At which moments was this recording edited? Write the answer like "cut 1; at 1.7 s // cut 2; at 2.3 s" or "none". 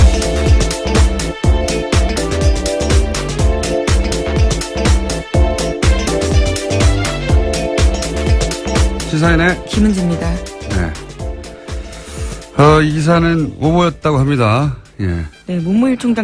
none